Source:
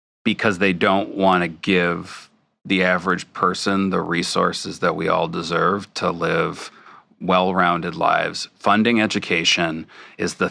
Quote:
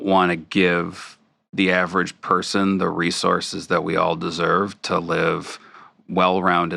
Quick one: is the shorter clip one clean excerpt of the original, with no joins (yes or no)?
yes